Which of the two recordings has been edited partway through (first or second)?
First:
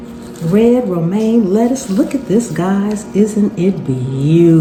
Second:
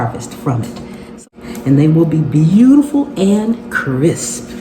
second